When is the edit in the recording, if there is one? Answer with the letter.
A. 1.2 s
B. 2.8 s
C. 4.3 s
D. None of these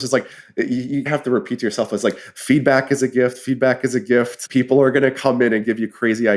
C